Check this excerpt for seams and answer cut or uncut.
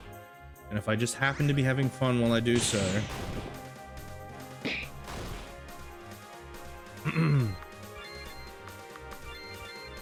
uncut